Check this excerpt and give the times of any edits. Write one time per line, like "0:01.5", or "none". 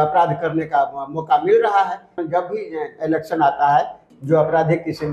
0:02.1
0:04.0